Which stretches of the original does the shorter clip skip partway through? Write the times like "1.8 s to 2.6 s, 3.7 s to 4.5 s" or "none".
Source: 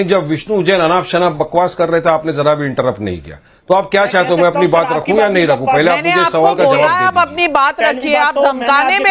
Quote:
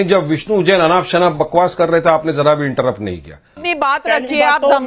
3.6 s to 7.3 s